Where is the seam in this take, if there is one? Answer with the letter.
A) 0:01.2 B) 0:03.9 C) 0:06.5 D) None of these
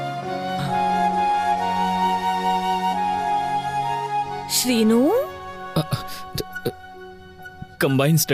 D